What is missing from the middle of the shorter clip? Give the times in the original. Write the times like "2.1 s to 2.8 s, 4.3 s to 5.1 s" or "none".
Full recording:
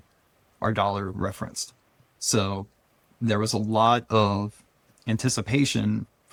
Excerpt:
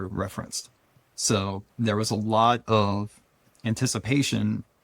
2.7 s to 3.1 s